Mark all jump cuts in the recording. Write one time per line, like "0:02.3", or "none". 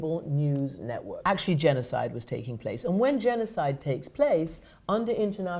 0:01.1